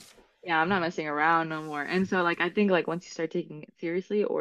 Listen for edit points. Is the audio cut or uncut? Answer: uncut